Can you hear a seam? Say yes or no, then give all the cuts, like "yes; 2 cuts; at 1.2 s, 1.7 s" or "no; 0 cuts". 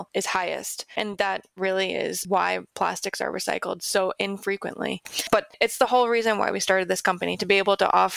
yes; 1 cut; at 5.1 s